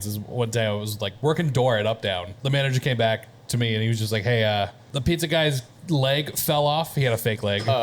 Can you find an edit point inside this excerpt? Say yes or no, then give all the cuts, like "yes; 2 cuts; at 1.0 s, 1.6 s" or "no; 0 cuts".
yes; 2 cuts; at 2.3 s, 4.8 s